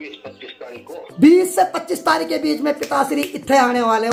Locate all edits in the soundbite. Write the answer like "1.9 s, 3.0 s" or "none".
none